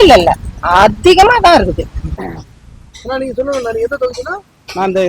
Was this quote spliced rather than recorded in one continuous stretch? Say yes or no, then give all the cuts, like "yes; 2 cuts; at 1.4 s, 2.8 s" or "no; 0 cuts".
yes; 1 cut; at 2.3 s